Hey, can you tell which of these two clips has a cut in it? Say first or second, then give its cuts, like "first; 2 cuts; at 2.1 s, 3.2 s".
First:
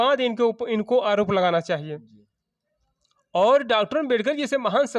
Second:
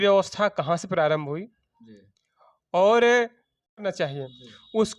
second; 1 cut; at 3.8 s